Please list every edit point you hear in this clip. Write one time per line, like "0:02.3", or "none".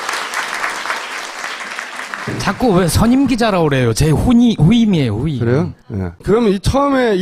0:05.1